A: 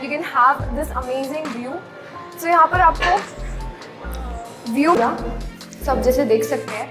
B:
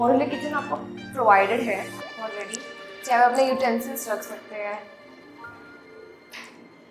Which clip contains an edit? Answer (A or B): A